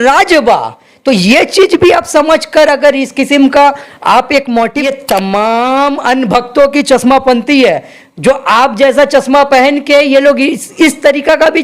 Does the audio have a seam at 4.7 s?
yes; 1 cut; at 4.7 s

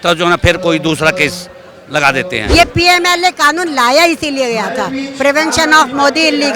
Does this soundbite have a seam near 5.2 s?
no; 1 cut; at 2.5 s

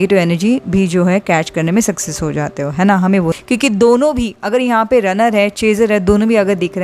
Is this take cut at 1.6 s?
no; 1 cut; at 3.4 s

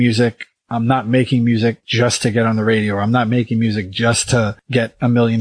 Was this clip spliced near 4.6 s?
yes; 2 cuts; at 1.8 s, 4.6 s

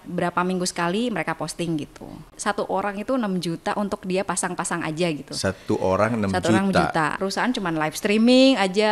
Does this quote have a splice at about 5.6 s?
no; 2 cuts; at 2.3 s, 7.1 s

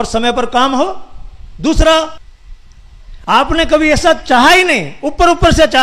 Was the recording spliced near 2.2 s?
yes; 1 cut; at 2.2 s

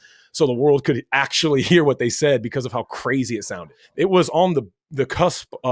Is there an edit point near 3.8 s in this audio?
yes; 1 cut; at 3.8 s

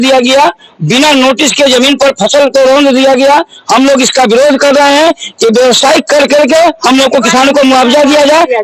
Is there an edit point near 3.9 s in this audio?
no; 0 cuts

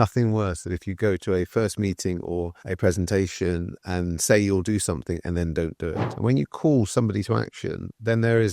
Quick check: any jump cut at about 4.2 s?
no; 1 cut; at 6.0 s

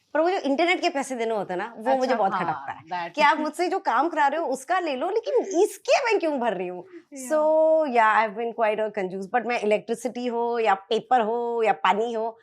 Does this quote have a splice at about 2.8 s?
no; 0 cuts

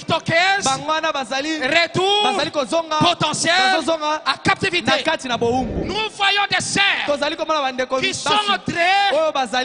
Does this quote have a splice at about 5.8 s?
no; 0 cuts

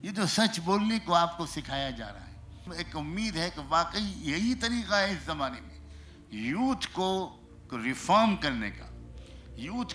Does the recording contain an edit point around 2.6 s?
yes; 1 cut; at 2.6 s

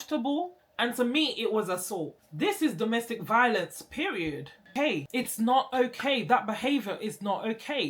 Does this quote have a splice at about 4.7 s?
yes; 1 cut; at 4.7 s

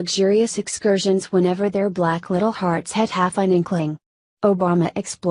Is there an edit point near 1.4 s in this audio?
yes; 1 cut; at 1.4 s

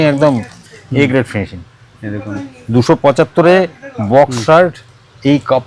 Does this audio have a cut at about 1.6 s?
no; 0 cuts

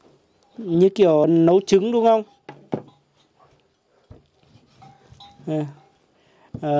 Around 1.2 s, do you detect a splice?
yes; 1 cut; at 1.2 s

